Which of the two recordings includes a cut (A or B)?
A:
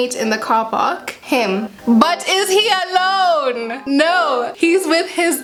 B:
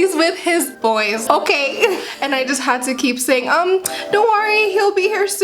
B